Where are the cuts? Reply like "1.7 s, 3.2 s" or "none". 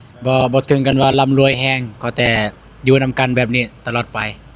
none